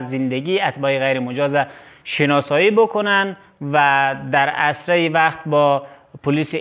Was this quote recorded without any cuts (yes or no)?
yes